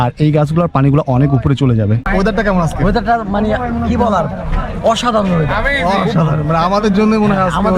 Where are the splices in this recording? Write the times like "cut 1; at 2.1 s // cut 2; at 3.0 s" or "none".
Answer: cut 1; at 2.0 s